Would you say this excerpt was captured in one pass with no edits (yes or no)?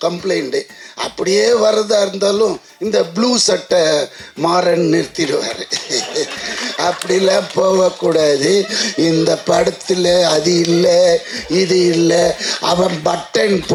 yes